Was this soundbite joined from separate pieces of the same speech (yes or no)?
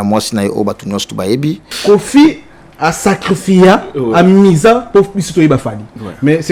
yes